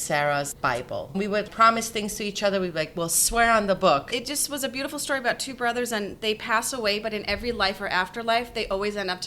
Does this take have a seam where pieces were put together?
yes; 2 cuts; at 1.2 s, 4.1 s

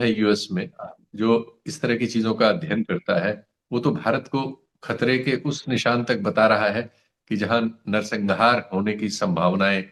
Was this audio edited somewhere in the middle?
no; 0 cuts

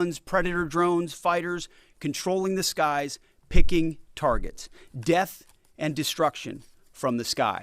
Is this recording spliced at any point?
no; 0 cuts

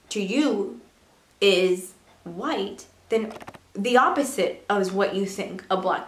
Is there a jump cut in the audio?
no; 0 cuts

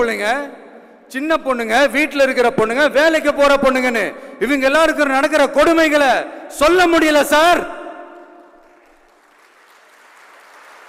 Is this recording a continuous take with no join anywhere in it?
yes; 0 cuts

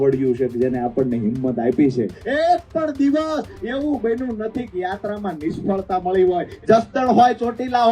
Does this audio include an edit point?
yes; 2 cuts; at 2.2 s, 6.5 s

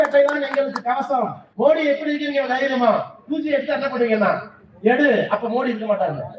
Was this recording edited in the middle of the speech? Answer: yes; 1 cut; at 1.4 s

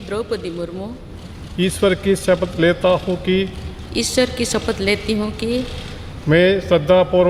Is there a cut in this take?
no; 0 cuts

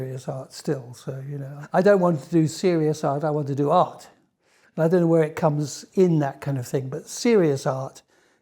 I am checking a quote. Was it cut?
yes; 1 cut; at 1.5 s

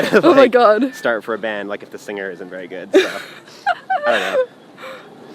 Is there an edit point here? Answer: no; 0 cuts

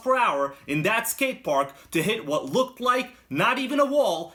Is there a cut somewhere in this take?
no; 0 cuts

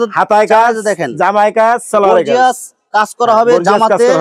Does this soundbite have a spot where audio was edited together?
no; 0 cuts

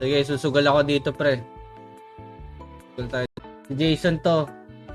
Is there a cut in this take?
yes; 1 cut; at 3.3 s

